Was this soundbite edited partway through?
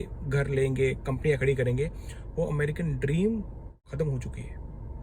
yes; 1 cut; at 3.8 s

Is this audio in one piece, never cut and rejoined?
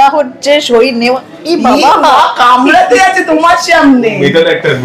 yes; 0 cuts

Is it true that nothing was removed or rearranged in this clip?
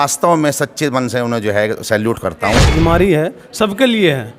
no; 1 cut; at 2.7 s

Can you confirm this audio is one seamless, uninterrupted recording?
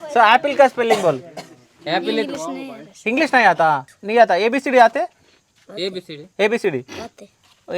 no; 1 cut; at 3.9 s

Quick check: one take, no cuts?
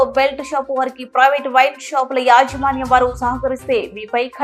yes; 0 cuts

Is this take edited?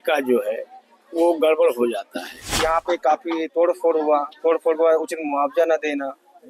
yes; 1 cut; at 2.6 s

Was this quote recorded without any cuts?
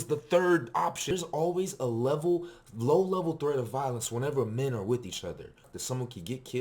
no; 2 cuts; at 1.0 s, 5.7 s

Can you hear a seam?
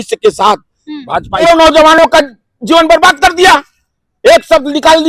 yes; 1 cut; at 1.4 s

